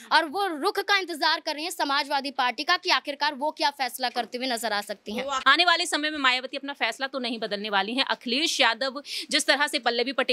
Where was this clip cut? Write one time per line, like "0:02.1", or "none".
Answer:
0:05.4